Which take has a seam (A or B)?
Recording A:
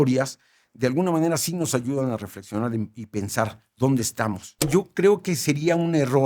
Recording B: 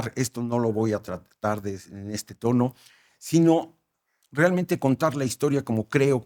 A